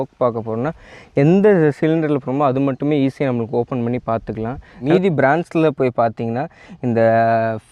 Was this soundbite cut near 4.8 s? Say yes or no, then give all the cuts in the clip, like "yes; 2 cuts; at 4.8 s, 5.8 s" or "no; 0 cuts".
yes; 1 cut; at 4.8 s